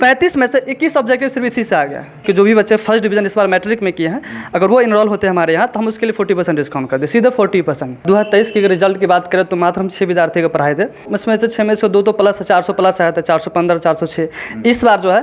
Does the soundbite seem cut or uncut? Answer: cut